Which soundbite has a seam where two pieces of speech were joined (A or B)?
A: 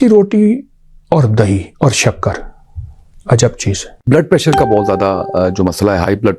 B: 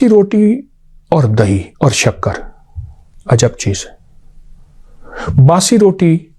A